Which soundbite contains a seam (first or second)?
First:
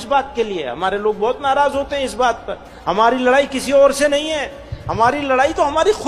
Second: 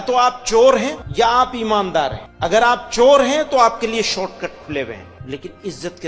second